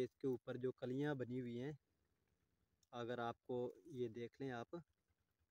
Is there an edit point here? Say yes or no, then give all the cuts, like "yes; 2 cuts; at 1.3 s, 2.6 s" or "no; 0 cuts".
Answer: no; 0 cuts